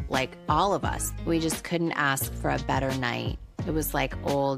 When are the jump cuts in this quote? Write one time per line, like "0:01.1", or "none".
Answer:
none